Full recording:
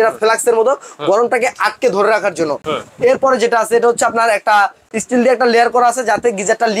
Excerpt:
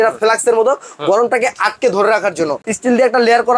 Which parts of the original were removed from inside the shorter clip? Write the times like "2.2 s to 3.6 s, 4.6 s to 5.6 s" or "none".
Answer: 2.6 s to 4.9 s